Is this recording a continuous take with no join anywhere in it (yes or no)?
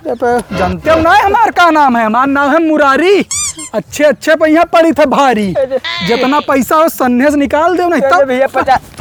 yes